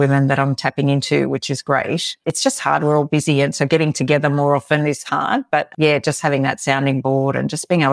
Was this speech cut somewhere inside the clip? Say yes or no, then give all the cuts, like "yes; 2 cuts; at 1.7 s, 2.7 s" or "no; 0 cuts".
no; 0 cuts